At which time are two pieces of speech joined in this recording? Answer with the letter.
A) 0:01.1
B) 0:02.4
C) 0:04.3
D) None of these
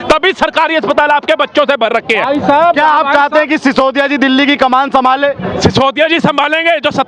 D